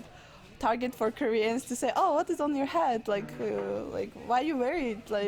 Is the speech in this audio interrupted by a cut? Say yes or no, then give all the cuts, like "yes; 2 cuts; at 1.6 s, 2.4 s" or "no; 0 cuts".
no; 0 cuts